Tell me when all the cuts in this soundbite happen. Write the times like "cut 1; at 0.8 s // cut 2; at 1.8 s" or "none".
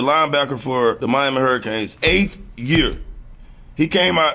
cut 1; at 1.2 s // cut 2; at 3.0 s